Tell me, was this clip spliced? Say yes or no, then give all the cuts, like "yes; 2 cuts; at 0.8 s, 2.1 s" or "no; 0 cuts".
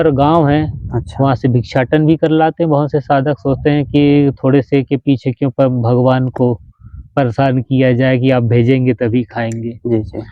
no; 0 cuts